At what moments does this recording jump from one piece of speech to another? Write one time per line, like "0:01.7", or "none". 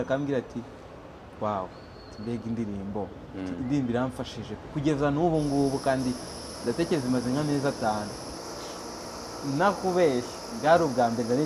0:08.4